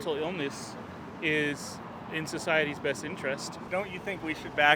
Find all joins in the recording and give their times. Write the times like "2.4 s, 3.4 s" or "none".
3.6 s